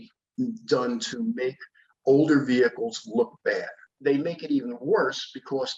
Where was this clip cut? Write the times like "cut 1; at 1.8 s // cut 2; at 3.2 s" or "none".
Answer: cut 1; at 3.9 s